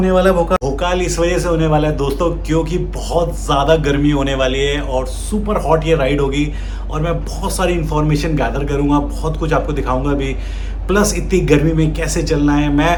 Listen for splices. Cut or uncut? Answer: uncut